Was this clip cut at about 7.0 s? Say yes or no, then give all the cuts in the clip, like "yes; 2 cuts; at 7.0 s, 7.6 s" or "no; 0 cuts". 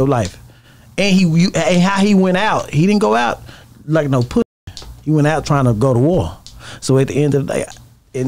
no; 0 cuts